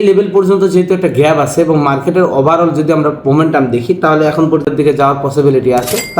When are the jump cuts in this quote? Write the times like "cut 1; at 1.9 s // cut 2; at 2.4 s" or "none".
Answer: cut 1; at 4.7 s